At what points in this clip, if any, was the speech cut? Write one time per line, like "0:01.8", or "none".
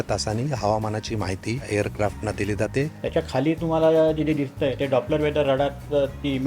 0:01.7
0:02.9